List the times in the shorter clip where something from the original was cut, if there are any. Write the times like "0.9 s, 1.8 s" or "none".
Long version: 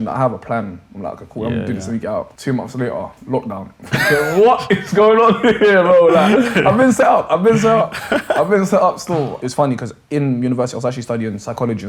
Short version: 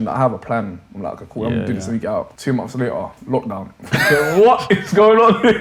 none